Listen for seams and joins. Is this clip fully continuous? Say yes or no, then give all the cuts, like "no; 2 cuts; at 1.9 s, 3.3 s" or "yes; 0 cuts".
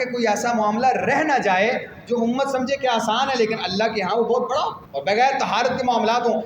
no; 1 cut; at 4.9 s